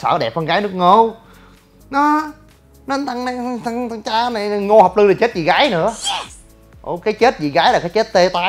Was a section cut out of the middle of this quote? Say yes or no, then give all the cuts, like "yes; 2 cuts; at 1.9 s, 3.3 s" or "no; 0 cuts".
no; 0 cuts